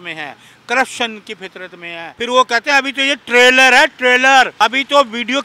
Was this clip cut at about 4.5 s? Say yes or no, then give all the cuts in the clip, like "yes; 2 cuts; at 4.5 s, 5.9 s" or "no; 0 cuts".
yes; 2 cuts; at 2.1 s, 4.5 s